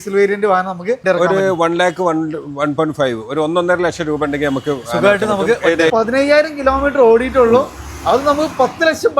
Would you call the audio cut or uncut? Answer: cut